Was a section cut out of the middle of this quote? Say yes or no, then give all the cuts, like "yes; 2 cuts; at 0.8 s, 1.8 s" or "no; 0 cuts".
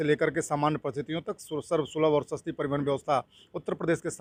no; 0 cuts